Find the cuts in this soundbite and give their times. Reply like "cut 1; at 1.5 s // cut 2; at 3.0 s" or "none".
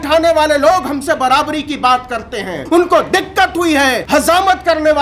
cut 1; at 2.6 s // cut 2; at 4.0 s